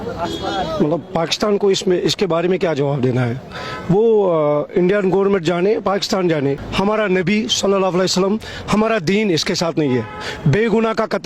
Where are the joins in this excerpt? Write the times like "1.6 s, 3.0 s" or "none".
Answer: 6.6 s